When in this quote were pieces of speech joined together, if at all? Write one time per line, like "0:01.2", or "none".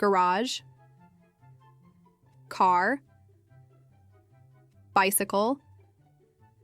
0:01.0
0:02.5
0:03.2
0:04.9
0:05.6